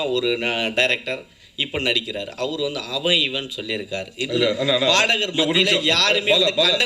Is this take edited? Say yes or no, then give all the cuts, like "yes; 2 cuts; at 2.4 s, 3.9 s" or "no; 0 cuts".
no; 0 cuts